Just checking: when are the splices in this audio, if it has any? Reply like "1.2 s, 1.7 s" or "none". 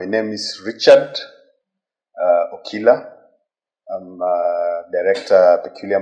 none